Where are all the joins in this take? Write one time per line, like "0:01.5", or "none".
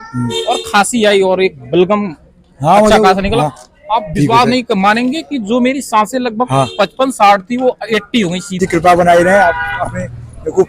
0:08.5